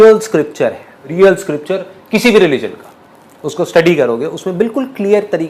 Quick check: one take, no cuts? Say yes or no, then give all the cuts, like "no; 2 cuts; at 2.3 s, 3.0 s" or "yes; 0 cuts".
no; 1 cut; at 1.0 s